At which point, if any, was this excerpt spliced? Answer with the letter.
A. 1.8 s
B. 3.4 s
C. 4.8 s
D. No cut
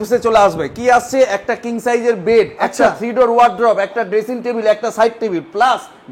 D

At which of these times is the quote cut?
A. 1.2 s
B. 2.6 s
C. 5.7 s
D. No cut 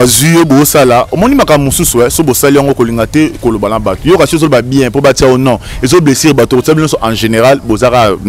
D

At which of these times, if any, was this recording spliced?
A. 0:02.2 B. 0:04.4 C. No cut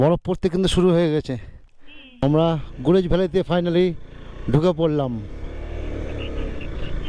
A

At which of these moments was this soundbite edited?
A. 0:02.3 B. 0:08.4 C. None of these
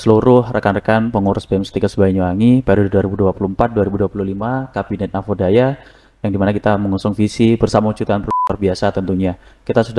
B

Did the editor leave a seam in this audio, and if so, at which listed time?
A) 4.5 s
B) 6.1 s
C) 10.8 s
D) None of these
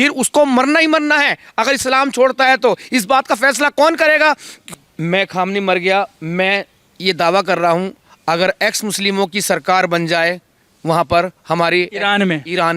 A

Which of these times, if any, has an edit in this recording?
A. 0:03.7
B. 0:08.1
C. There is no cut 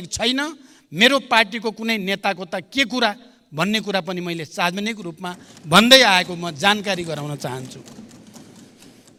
C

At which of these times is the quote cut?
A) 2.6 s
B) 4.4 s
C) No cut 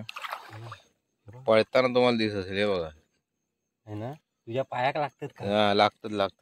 C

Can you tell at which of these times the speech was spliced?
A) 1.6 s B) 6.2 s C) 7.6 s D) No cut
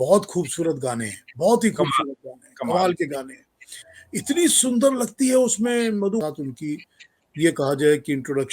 B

